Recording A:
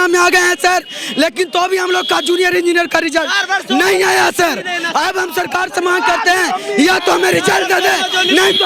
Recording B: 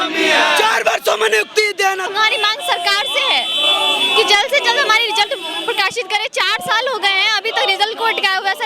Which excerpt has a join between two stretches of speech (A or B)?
B